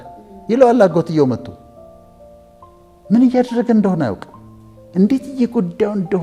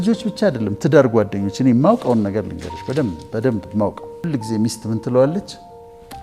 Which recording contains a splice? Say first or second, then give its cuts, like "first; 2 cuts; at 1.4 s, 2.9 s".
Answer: second; 1 cut; at 4.2 s